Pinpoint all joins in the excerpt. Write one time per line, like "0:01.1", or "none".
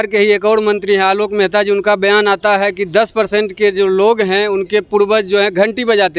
none

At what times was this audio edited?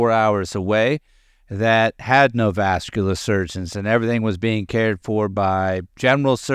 none

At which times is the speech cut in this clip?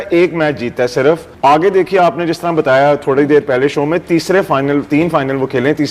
0:01.3

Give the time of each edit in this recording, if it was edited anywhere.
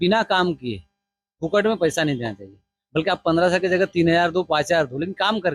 none

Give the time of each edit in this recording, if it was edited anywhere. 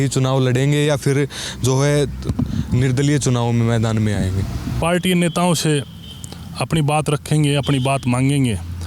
0:04.8

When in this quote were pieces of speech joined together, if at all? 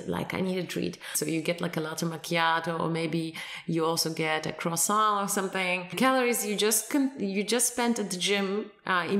0:01.1
0:06.0

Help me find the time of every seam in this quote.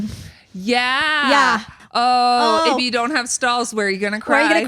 0:01.7

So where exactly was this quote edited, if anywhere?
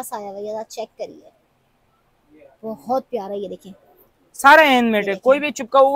none

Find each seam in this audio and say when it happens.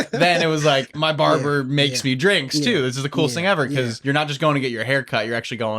0:00.9
0:04.0

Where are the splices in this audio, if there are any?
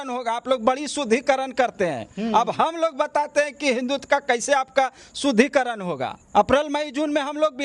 0:06.1

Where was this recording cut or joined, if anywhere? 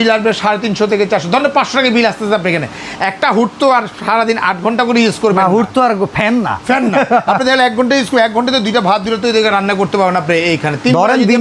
none

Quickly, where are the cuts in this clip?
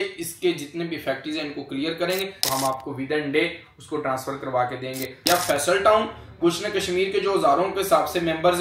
0:02.4
0:05.1

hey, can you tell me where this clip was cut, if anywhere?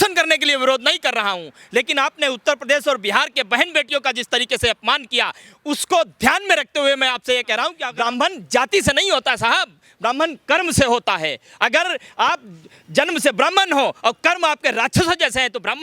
0:07.8

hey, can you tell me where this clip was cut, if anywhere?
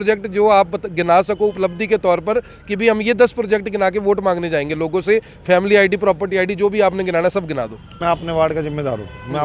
0:08.0

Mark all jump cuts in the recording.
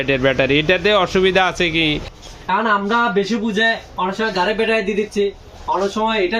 0:01.8

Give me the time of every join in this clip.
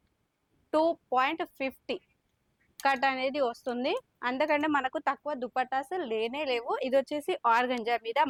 none

